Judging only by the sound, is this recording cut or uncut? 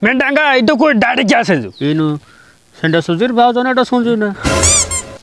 cut